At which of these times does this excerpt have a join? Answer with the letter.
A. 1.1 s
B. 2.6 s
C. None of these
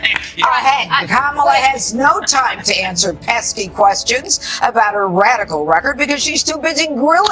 B